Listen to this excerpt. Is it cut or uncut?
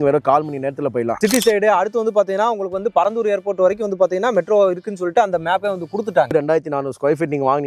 cut